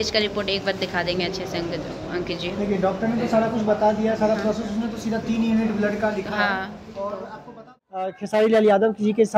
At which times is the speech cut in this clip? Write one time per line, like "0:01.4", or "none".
0:08.1